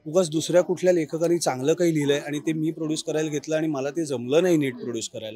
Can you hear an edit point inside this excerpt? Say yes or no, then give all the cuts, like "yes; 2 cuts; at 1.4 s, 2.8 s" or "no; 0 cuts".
no; 0 cuts